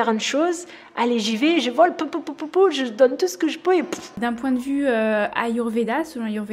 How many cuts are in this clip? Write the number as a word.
one